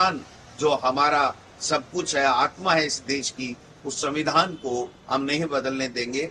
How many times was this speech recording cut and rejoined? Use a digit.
0